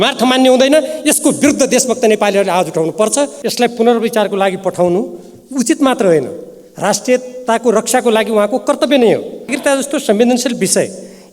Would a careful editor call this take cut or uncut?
cut